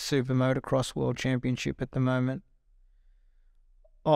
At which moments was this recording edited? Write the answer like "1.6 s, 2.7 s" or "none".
none